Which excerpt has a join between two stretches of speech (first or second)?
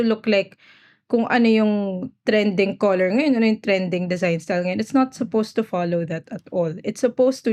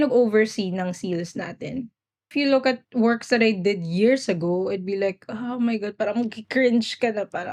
second